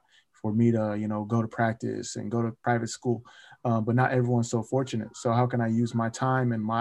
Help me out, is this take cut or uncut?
cut